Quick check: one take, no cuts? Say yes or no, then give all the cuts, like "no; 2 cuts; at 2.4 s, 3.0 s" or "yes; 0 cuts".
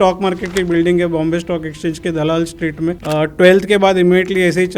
no; 1 cut; at 3.0 s